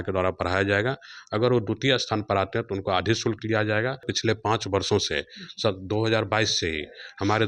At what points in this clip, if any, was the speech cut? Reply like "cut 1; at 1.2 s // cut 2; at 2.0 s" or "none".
cut 1; at 4.1 s